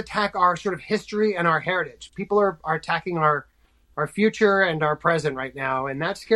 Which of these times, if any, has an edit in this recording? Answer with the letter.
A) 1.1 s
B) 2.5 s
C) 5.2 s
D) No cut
D